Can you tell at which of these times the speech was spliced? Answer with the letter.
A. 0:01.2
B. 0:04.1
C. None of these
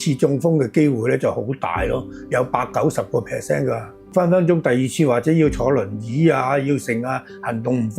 B